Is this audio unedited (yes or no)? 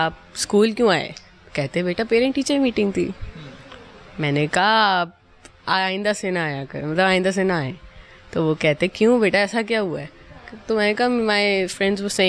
yes